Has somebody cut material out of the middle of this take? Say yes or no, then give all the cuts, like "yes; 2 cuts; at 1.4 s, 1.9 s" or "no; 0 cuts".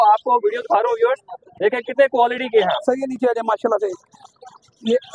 no; 0 cuts